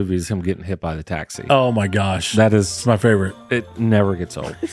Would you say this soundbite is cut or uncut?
uncut